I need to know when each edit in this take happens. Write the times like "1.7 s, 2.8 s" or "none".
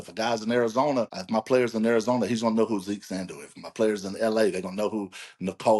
1.2 s